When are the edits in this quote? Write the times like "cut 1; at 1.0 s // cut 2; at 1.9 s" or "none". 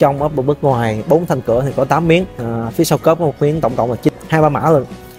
cut 1; at 4.1 s